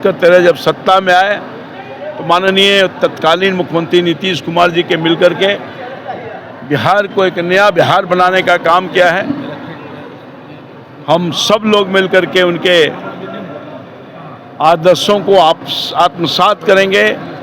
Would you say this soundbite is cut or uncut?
uncut